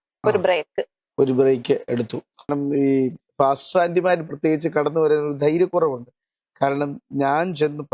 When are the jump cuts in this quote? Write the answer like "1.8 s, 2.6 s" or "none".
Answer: 2.5 s